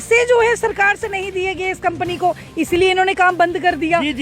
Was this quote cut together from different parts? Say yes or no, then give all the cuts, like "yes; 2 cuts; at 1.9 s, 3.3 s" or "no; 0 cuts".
no; 0 cuts